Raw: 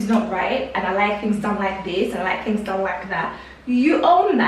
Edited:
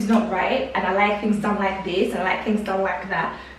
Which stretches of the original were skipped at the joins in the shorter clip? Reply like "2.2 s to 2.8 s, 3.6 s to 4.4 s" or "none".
none